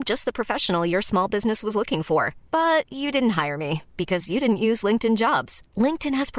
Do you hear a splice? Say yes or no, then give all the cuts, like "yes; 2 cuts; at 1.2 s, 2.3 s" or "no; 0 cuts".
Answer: no; 0 cuts